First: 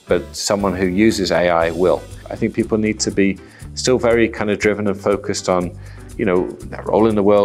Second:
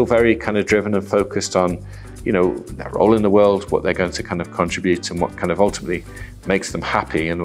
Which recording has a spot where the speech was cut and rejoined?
first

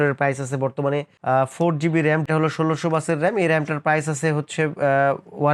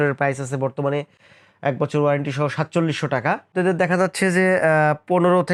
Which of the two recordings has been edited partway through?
first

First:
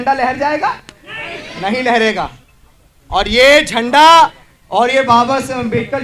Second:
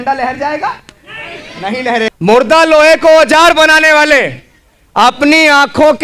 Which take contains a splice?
second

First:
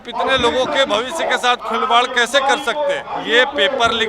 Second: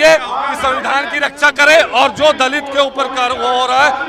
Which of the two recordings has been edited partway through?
first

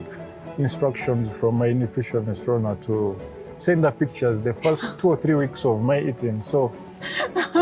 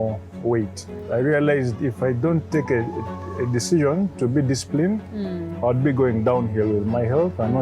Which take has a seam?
second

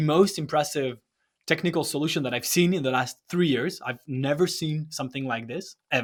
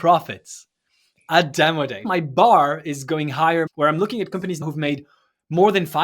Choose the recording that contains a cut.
second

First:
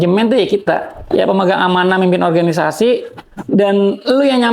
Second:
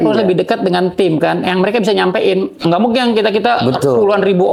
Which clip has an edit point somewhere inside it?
first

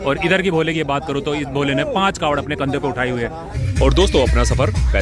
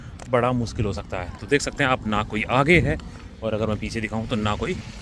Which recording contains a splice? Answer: first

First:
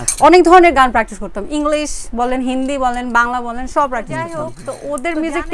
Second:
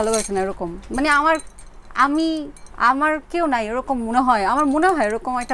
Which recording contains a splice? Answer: first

